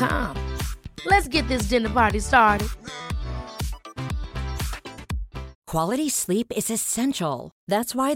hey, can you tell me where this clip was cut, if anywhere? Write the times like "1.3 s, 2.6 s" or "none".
5.6 s